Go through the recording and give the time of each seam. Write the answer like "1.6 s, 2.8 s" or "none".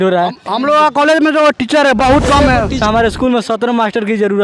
2.8 s